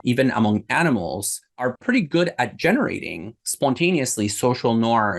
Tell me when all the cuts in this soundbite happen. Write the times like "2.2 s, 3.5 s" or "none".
1.6 s